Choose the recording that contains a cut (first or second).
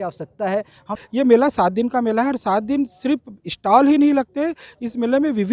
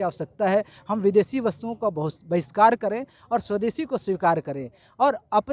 first